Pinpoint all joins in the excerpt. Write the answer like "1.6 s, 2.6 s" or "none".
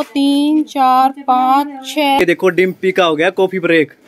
2.2 s

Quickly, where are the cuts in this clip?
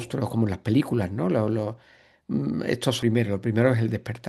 3.0 s

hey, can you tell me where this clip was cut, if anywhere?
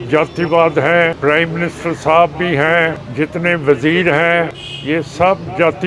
1.2 s, 3.0 s, 4.7 s

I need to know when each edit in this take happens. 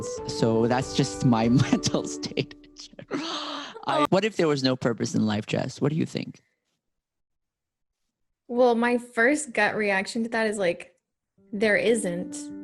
4.1 s

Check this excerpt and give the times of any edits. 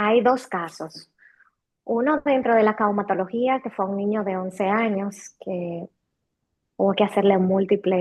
none

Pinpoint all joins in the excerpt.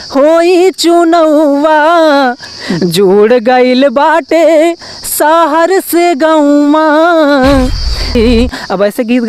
8.1 s

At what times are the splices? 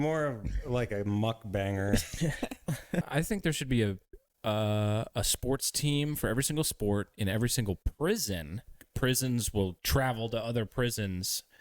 3.1 s, 8.8 s

